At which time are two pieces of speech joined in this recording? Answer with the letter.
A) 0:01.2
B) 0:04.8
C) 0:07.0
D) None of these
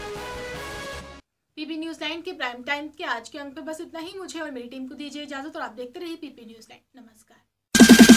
D